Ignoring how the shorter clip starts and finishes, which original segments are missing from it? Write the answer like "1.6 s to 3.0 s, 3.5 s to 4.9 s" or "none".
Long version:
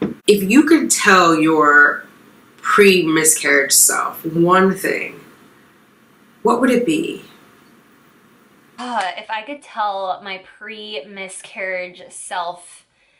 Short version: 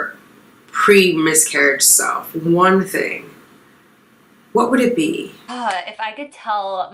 7.3 s to 8.7 s